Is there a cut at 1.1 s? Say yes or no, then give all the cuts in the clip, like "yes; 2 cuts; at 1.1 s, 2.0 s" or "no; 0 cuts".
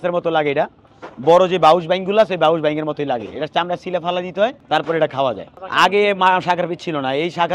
no; 2 cuts; at 4.6 s, 5.5 s